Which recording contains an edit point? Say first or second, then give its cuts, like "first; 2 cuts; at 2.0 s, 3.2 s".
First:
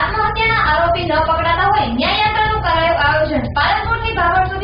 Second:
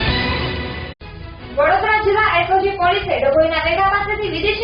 second; 1 cut; at 0.9 s